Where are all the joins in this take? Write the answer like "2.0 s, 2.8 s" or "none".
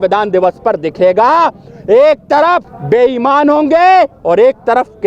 2.7 s